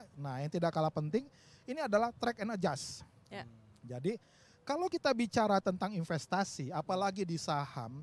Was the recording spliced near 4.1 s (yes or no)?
no